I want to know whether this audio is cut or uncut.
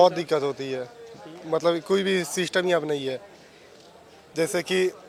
uncut